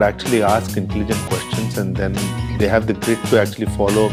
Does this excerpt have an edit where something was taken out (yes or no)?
no